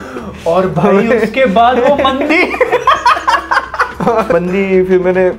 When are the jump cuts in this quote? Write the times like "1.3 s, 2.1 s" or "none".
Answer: 4.3 s